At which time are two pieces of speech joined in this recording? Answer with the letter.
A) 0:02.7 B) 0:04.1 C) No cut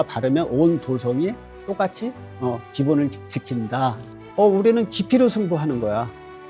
B